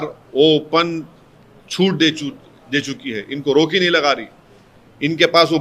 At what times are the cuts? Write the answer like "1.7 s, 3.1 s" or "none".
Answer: none